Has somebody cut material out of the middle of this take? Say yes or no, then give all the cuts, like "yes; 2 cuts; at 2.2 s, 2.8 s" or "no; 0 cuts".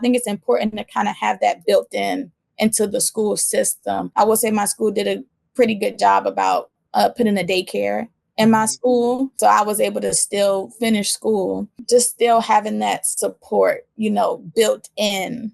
yes; 3 cuts; at 4.1 s, 9.4 s, 11.7 s